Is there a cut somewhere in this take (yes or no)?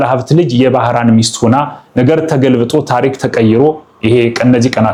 no